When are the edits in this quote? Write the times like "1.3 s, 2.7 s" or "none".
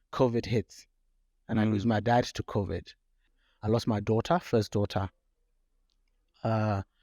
3.2 s